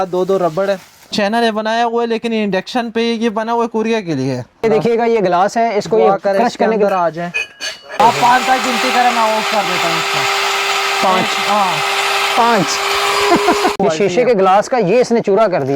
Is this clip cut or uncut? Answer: cut